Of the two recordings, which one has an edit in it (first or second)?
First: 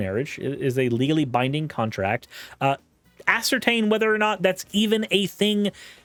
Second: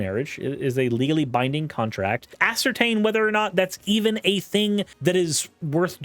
second